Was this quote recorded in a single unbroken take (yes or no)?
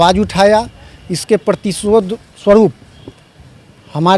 yes